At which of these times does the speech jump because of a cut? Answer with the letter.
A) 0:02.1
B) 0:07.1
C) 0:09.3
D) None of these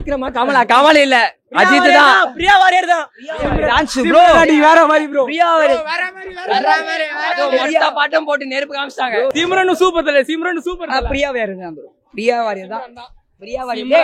C